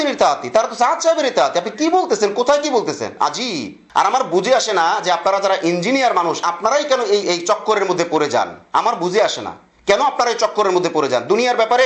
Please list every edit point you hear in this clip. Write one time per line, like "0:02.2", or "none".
0:03.8